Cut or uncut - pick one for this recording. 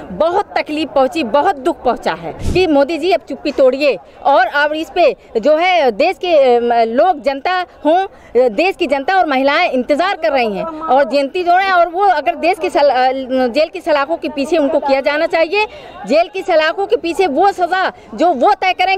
cut